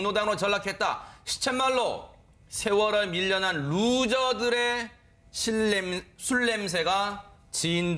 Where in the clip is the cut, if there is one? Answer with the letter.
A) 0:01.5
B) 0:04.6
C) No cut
C